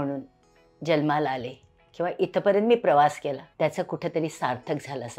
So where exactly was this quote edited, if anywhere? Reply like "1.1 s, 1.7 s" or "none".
3.5 s